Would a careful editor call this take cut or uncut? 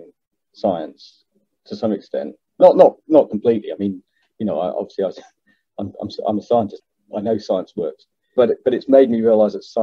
cut